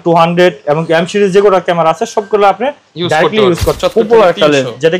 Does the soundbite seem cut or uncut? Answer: cut